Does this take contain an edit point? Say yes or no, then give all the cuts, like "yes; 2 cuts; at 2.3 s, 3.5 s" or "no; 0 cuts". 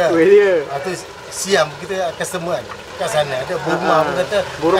yes; 1 cut; at 2.8 s